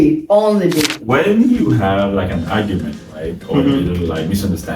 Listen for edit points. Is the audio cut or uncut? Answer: cut